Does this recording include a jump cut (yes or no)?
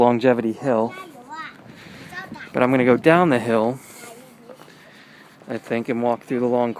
yes